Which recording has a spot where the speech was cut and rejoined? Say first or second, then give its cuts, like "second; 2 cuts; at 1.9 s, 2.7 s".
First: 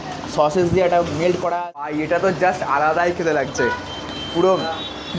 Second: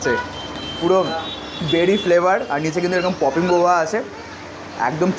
first; 1 cut; at 1.9 s